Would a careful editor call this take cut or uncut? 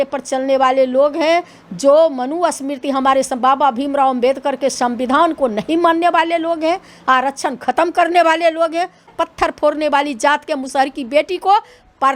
cut